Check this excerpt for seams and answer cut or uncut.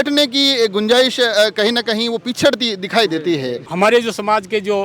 cut